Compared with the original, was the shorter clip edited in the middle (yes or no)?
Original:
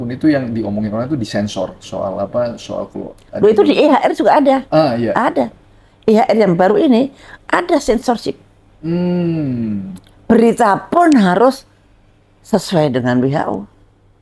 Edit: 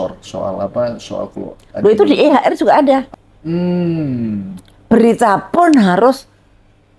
yes